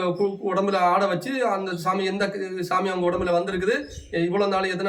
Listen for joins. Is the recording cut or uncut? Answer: uncut